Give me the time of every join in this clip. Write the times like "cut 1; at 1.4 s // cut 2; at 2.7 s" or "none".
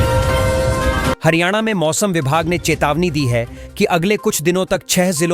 cut 1; at 1.2 s

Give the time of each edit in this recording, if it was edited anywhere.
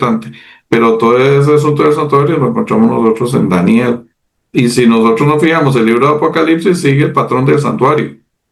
none

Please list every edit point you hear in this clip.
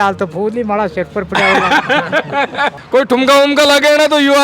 cut 1; at 2.8 s

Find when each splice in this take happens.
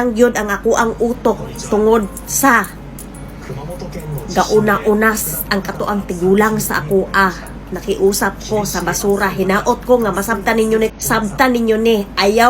cut 1; at 10.9 s

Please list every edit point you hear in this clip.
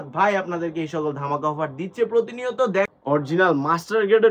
cut 1; at 2.9 s

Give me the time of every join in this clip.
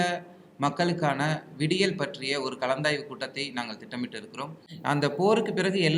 cut 1; at 4.6 s

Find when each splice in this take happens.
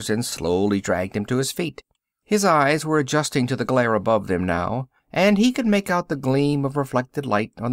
cut 1; at 3.8 s

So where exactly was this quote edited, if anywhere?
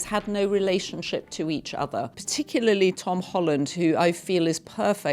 cut 1; at 2.2 s

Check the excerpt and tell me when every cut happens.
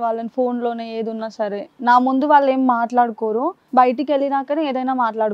none

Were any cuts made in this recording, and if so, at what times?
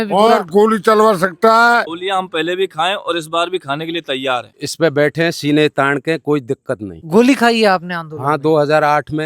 cut 1; at 1.8 s // cut 2; at 4.5 s // cut 3; at 7.0 s

